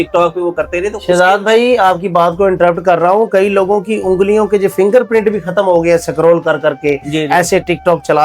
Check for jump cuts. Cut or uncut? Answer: uncut